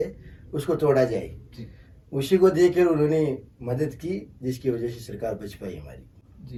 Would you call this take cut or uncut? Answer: uncut